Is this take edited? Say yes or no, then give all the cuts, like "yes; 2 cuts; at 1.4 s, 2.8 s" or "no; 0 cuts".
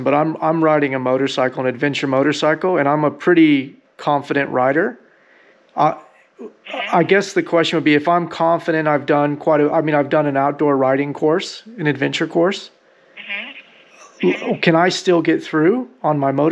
no; 0 cuts